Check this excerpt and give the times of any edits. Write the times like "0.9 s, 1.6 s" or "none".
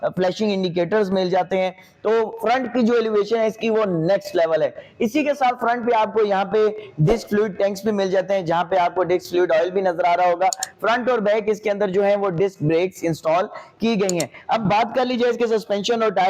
none